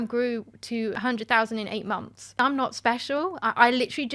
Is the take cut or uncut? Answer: cut